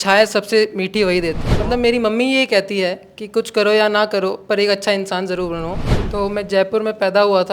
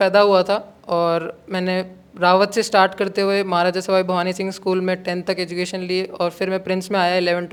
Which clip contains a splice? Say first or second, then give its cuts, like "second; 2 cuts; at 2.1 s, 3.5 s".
first; 2 cuts; at 1.6 s, 5.8 s